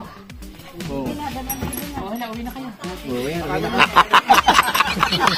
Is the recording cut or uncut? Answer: uncut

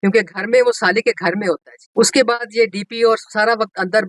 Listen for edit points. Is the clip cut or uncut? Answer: cut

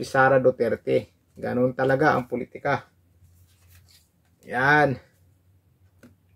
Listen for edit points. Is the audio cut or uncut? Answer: uncut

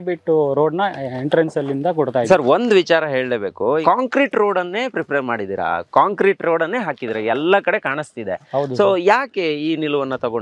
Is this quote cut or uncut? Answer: uncut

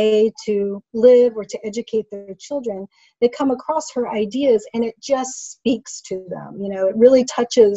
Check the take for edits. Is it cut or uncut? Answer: uncut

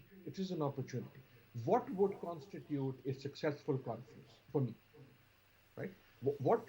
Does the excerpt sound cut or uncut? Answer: uncut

